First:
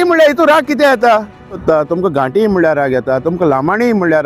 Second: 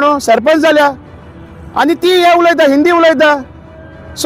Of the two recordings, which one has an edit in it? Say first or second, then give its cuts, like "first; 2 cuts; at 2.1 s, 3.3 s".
first; 1 cut; at 1.6 s